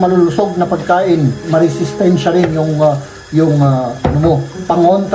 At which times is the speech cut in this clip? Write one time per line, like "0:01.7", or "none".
0:01.4